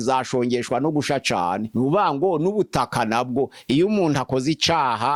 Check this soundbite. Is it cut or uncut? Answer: uncut